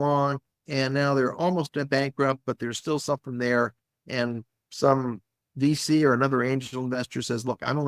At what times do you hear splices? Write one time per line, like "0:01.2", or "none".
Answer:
none